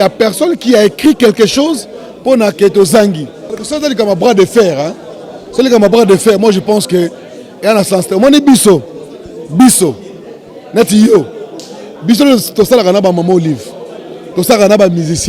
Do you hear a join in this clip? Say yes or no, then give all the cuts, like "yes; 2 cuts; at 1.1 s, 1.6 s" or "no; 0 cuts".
yes; 1 cut; at 3.6 s